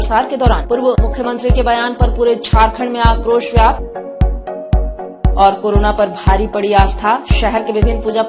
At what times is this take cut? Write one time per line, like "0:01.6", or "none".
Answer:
0:03.8
0:05.3